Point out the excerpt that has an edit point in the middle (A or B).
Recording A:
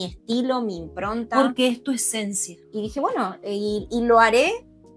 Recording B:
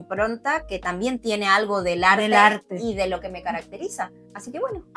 A